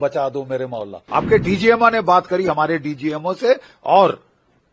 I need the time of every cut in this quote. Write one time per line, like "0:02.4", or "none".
0:00.9